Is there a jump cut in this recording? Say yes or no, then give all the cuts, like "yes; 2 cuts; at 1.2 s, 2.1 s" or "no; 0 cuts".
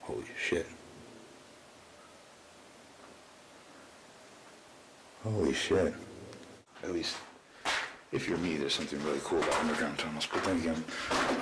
yes; 1 cut; at 6.7 s